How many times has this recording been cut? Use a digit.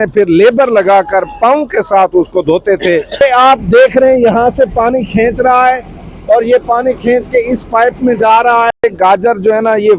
2